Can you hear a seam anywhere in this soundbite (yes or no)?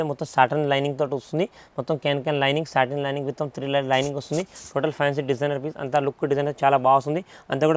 no